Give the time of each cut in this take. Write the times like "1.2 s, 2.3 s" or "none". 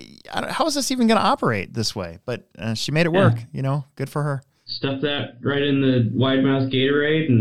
4.6 s